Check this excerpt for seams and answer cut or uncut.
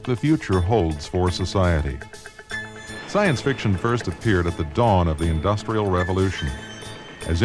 cut